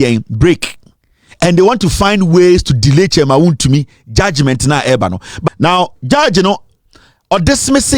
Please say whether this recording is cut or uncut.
cut